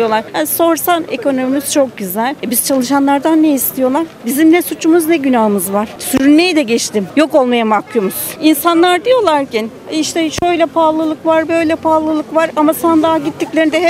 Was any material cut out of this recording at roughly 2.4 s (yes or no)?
yes